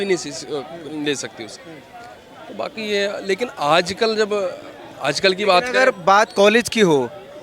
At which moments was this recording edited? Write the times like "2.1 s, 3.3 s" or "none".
none